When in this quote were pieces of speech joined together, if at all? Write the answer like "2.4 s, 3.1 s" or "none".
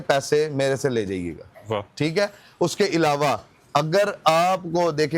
none